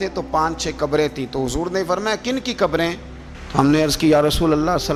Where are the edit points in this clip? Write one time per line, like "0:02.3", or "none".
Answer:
none

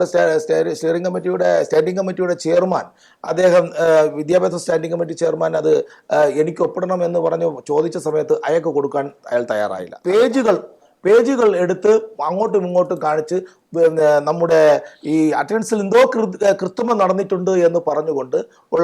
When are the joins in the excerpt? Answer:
0:09.9

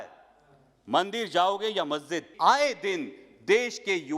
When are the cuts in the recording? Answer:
0:02.2

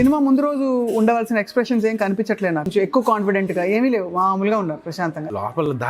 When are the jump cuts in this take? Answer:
0:02.7
0:04.9

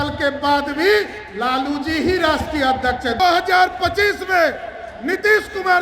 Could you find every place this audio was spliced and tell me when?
0:03.1

